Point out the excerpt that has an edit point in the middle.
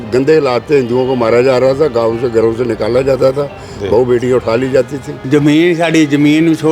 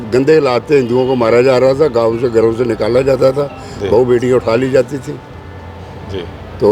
first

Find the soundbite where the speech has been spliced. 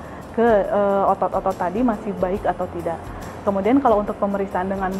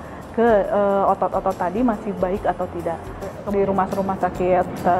second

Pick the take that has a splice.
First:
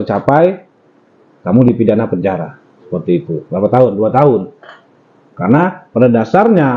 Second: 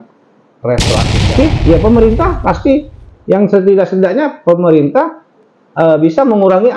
second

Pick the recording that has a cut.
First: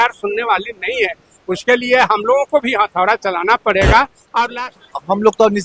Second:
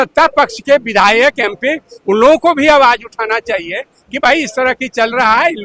first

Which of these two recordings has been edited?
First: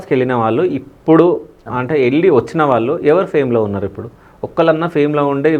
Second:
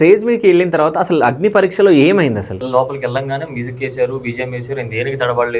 second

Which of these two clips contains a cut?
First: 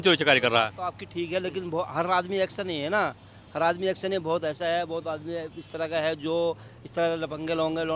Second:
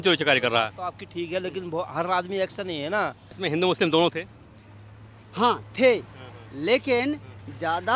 second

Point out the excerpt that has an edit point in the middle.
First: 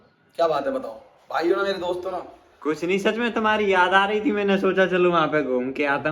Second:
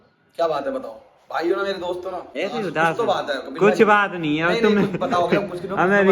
second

